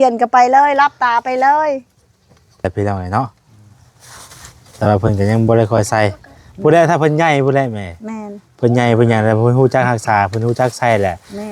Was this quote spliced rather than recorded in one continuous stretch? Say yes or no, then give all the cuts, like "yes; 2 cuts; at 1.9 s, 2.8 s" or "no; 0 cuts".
yes; 1 cut; at 2.6 s